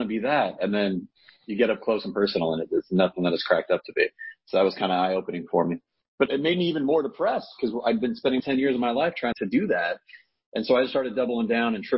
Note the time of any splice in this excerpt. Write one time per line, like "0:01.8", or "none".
0:06.2
0:08.4
0:09.3